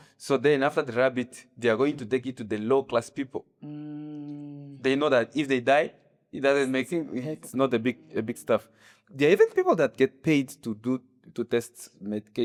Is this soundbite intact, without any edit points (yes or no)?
yes